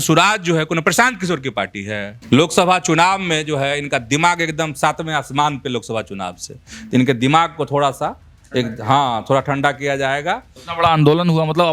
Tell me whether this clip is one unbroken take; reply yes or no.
no